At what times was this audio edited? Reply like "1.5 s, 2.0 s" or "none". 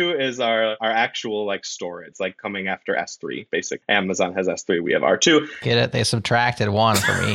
0.8 s, 2.1 s, 3.7 s

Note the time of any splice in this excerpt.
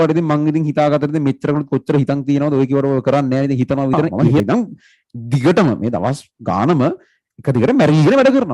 4.4 s

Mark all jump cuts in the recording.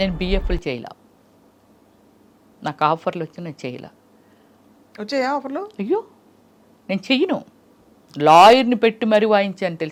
none

